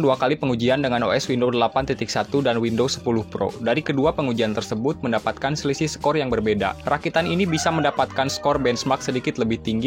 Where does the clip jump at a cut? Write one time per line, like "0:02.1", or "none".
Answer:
none